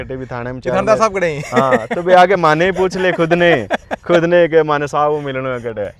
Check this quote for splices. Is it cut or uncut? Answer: uncut